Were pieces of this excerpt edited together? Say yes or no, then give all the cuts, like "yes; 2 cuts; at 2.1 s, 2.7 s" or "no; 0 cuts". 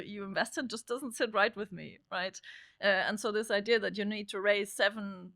no; 0 cuts